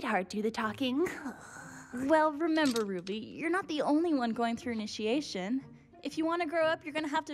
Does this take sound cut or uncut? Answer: uncut